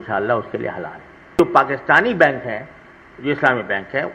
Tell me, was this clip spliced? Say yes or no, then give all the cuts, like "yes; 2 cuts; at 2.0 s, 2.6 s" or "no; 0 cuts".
yes; 1 cut; at 1.4 s